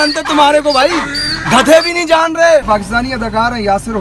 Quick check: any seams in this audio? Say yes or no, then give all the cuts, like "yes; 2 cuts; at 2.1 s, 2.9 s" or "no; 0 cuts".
yes; 1 cut; at 2.6 s